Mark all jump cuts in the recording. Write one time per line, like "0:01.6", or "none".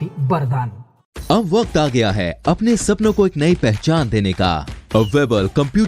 none